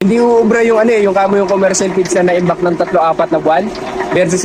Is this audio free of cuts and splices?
yes; 0 cuts

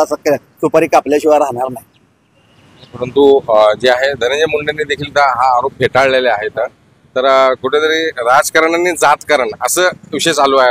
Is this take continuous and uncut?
yes; 0 cuts

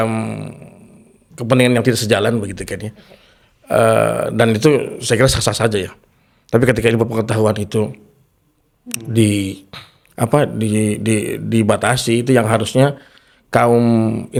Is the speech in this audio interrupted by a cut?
no; 0 cuts

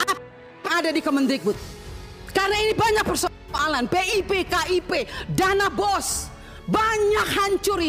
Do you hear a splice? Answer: no; 0 cuts

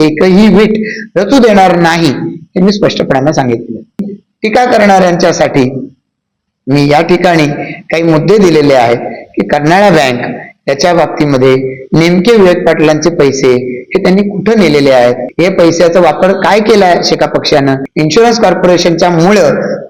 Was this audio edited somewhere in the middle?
yes; 3 cuts; at 4.0 s, 15.3 s, 17.9 s

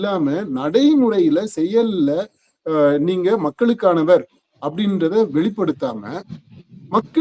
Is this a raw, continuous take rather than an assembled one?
yes; 0 cuts

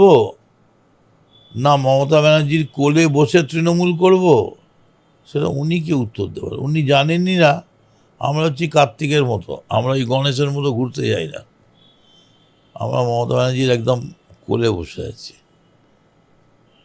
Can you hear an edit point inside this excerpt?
no; 0 cuts

